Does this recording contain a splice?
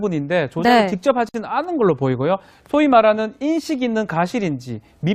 no; 0 cuts

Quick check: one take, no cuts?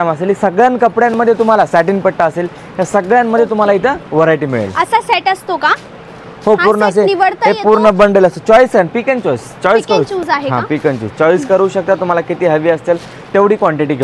yes; 0 cuts

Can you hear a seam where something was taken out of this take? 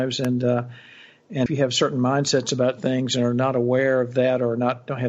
yes; 1 cut; at 1.5 s

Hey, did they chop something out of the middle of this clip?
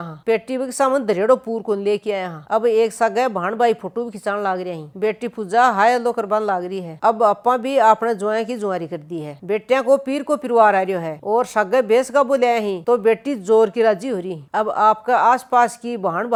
no; 0 cuts

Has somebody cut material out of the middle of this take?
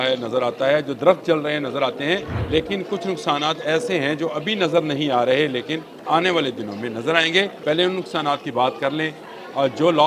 yes; 3 cuts; at 2.3 s, 5.9 s, 7.6 s

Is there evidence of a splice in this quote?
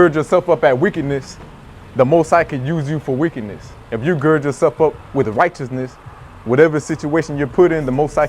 no; 0 cuts

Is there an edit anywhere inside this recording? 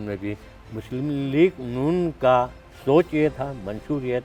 no; 0 cuts

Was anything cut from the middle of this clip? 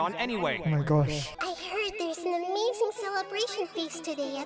yes; 1 cut; at 1.2 s

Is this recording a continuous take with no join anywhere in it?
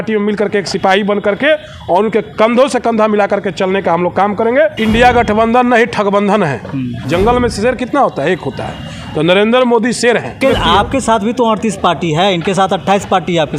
no; 3 cuts; at 4.8 s, 7.0 s, 10.4 s

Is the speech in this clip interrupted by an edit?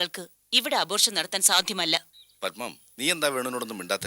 yes; 1 cut; at 2.2 s

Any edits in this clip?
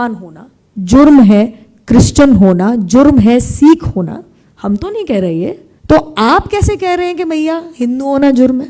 yes; 1 cut; at 5.7 s

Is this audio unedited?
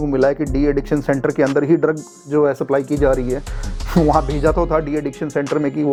yes; 0 cuts

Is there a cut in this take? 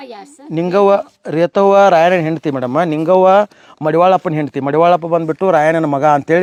no; 0 cuts

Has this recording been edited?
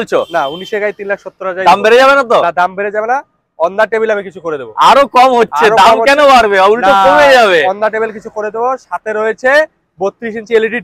no; 0 cuts

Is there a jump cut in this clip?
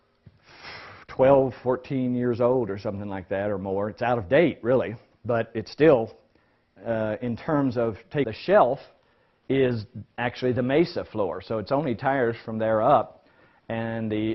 no; 0 cuts

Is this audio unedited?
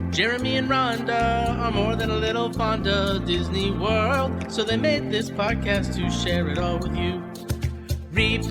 no; 1 cut; at 1.5 s

